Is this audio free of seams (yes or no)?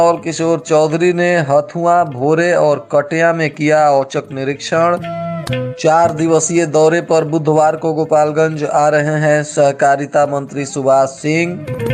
yes